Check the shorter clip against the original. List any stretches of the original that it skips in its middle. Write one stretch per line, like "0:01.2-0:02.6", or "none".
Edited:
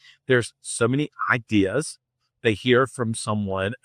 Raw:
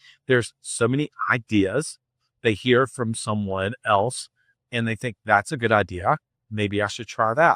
none